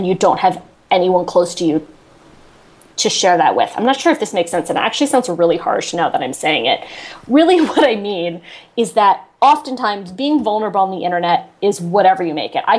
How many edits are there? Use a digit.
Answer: 0